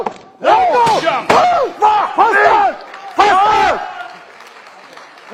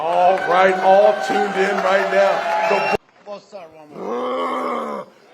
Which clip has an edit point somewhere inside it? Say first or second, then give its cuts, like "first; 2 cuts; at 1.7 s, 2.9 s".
second; 1 cut; at 2.9 s